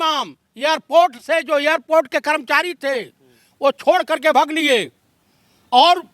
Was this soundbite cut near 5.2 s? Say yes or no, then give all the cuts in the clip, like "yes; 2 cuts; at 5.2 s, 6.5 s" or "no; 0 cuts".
no; 0 cuts